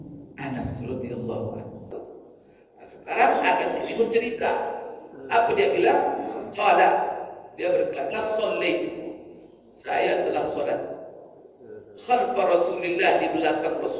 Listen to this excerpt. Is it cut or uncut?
cut